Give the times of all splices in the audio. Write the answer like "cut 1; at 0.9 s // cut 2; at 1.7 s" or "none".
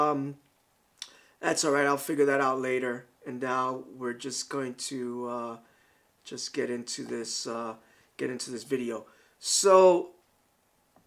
cut 1; at 8.2 s